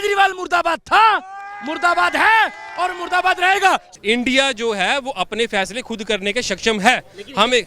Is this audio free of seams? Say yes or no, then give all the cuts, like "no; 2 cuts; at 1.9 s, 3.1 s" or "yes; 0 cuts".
no; 1 cut; at 3.9 s